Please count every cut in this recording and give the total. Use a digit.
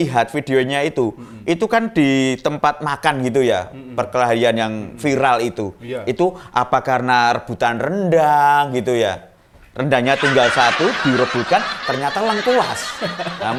0